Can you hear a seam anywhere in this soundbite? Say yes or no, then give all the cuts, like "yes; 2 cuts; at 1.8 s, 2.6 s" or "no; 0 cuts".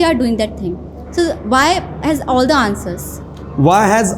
no; 0 cuts